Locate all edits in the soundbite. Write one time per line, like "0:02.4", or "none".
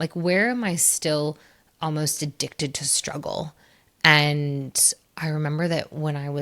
none